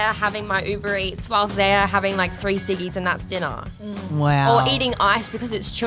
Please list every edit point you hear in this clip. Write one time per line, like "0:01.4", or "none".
none